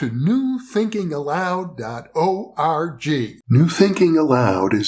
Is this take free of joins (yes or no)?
no